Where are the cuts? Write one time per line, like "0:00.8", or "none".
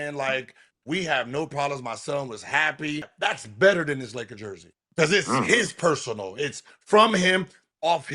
0:03.1
0:04.9